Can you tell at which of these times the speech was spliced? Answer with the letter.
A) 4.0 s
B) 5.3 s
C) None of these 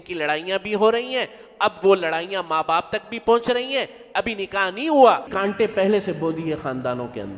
B